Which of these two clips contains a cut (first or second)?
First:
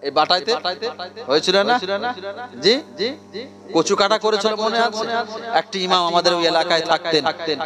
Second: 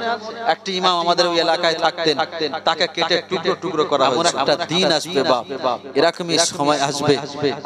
second